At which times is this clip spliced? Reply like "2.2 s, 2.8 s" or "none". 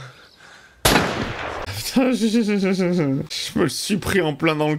1.7 s, 3.3 s